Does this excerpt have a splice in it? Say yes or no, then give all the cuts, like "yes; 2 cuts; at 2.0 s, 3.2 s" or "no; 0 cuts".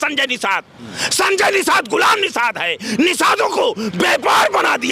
no; 0 cuts